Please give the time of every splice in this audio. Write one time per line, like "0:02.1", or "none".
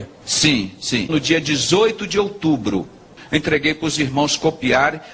0:03.2